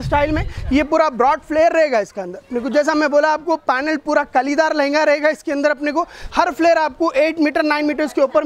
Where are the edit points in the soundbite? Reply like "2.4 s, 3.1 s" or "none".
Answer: none